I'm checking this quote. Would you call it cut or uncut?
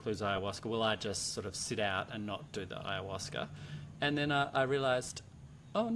uncut